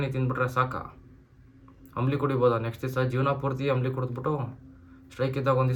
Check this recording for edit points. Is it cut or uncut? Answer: uncut